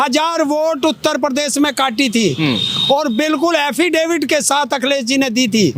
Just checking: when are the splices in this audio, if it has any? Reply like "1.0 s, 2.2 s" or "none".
none

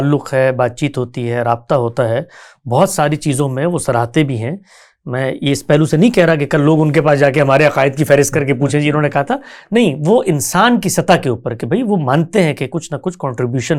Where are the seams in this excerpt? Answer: none

